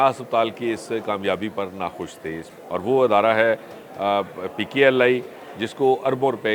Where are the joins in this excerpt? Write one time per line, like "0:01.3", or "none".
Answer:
0:02.5